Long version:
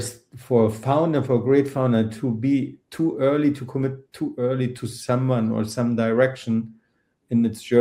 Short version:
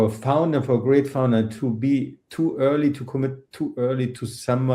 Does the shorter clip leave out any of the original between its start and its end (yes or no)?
no